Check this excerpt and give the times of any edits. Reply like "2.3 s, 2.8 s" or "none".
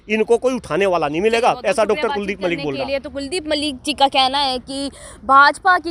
none